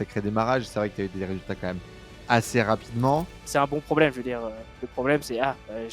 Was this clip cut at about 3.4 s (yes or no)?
yes